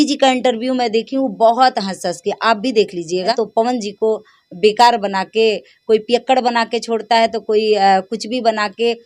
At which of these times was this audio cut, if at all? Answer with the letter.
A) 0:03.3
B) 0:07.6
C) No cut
A